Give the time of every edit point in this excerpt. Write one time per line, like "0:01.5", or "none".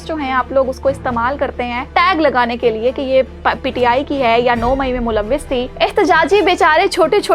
0:01.8
0:05.7